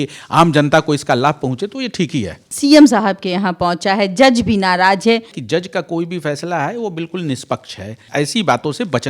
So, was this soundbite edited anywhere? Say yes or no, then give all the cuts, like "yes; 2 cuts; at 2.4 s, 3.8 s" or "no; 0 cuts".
yes; 3 cuts; at 2.4 s, 5.4 s, 8.0 s